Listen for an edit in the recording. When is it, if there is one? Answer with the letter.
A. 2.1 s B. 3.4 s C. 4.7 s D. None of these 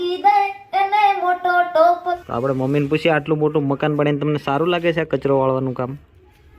A